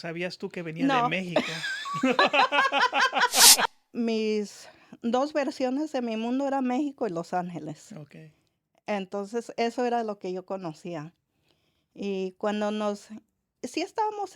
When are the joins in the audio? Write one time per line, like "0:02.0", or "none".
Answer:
0:03.7